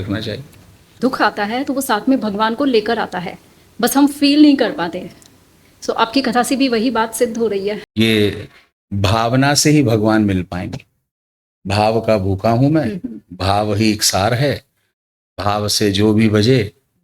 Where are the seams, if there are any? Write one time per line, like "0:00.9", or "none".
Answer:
0:00.9
0:07.8